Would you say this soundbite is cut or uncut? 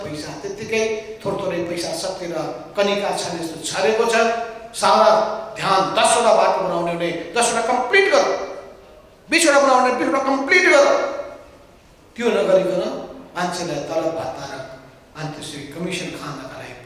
uncut